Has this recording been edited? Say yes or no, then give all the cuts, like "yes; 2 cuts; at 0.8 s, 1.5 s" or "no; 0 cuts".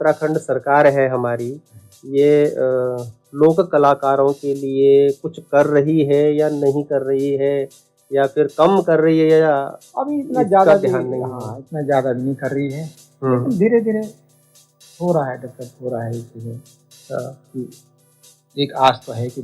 no; 0 cuts